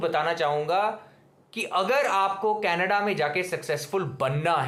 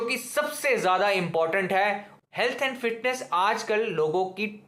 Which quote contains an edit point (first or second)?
second